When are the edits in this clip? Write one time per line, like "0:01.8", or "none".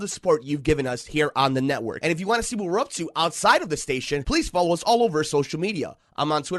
0:01.9

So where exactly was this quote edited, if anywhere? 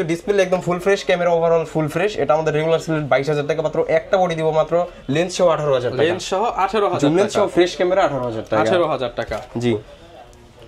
none

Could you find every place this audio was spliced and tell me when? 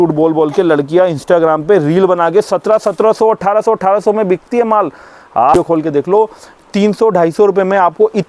0:05.5

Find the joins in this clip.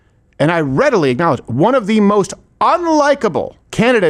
none

